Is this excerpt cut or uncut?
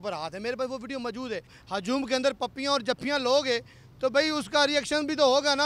cut